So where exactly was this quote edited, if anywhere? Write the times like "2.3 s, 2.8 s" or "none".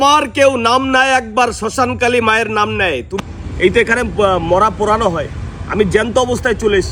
3.1 s

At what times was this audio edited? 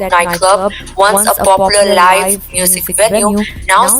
none

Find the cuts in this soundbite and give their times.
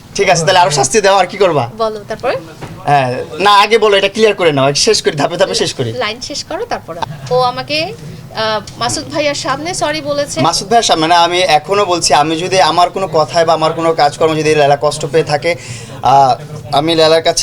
7.0 s

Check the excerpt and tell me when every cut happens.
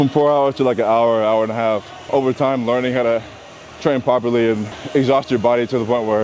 2.0 s, 4.8 s

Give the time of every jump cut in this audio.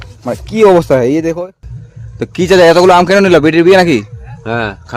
1.3 s

